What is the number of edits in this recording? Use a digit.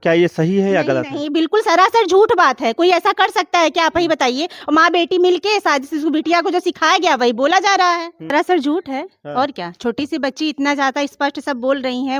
1